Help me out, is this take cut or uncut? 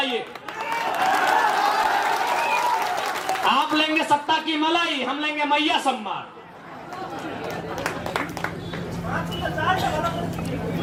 uncut